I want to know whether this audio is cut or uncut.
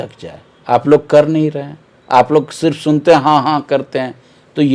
uncut